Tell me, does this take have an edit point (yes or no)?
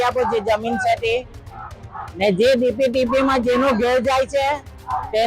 no